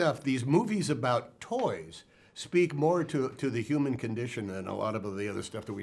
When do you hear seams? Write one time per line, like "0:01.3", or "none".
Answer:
none